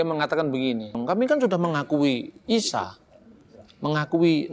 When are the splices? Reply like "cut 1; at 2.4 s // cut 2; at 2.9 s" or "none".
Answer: cut 1; at 1.0 s